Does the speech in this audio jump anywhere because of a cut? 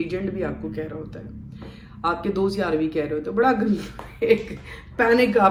no; 0 cuts

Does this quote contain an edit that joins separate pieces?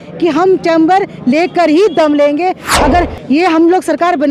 yes; 1 cut; at 2.7 s

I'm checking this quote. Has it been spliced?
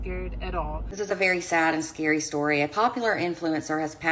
yes; 1 cut; at 0.9 s

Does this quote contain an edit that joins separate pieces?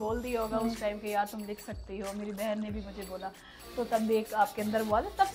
no; 0 cuts

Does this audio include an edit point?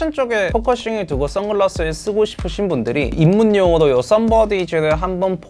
no; 0 cuts

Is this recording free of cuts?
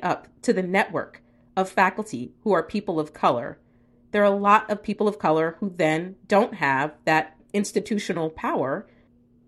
no; 1 cut; at 7.4 s

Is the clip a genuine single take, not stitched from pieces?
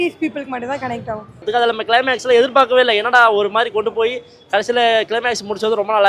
no; 1 cut; at 1.4 s

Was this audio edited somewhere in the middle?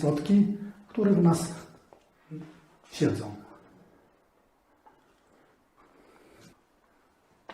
yes; 1 cut; at 6.5 s

